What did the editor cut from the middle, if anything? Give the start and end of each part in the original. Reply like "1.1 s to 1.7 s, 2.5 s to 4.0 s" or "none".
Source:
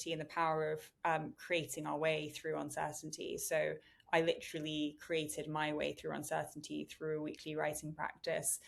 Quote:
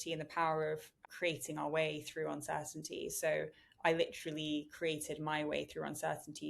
1.0 s to 1.2 s